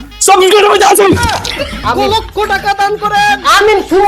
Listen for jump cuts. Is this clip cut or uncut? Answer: cut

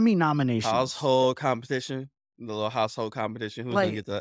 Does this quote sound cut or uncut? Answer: uncut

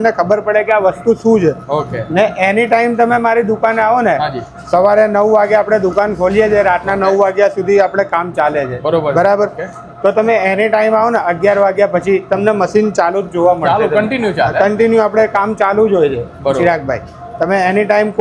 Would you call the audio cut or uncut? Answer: uncut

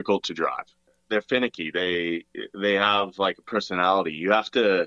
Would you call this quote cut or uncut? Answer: cut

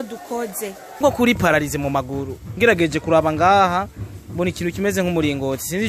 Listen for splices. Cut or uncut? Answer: cut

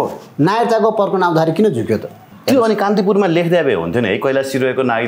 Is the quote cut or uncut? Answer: cut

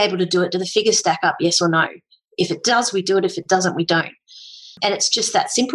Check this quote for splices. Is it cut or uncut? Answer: cut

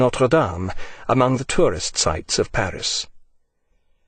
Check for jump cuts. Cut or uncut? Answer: cut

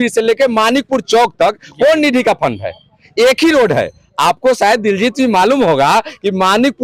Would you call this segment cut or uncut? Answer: uncut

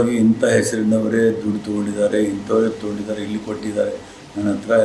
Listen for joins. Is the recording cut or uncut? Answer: uncut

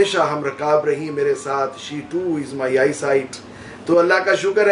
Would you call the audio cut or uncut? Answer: uncut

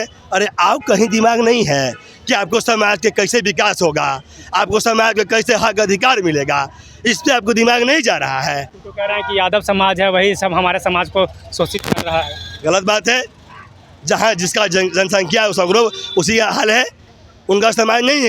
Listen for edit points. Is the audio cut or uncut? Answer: uncut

